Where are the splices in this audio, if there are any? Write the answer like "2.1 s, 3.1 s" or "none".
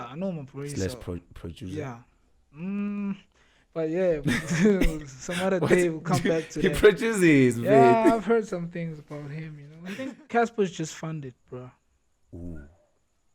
9.7 s

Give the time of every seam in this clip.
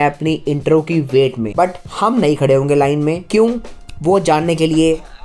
1.4 s, 3.2 s

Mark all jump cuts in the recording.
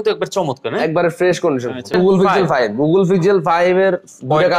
1.9 s

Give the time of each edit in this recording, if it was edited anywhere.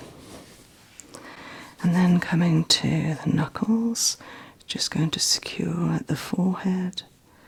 none

